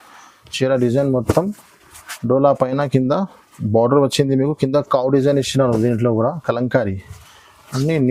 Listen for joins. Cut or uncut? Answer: uncut